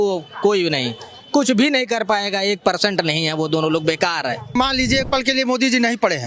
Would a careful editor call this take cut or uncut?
cut